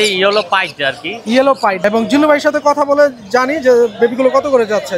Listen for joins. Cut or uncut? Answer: cut